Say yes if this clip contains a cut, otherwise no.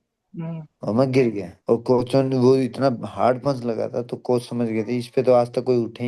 no